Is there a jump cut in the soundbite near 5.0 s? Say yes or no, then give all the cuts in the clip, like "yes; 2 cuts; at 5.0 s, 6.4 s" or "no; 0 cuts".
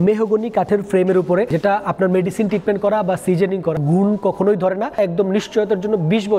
yes; 3 cuts; at 1.5 s, 3.8 s, 5.0 s